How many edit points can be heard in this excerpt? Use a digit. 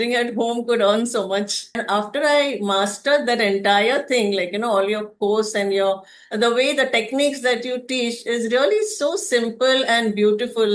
1